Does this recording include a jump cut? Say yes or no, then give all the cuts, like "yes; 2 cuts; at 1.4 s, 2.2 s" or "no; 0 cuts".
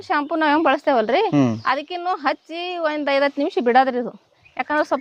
no; 0 cuts